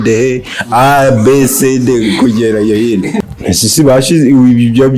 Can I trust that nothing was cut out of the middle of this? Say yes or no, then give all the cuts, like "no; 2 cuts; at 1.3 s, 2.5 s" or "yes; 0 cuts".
no; 1 cut; at 3.1 s